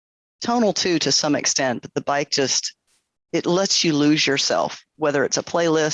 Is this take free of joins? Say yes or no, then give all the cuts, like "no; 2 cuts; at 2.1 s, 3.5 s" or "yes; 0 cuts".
yes; 0 cuts